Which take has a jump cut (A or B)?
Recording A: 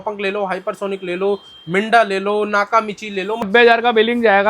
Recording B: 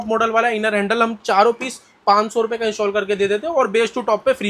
A